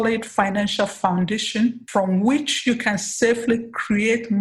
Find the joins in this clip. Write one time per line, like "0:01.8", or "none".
0:01.8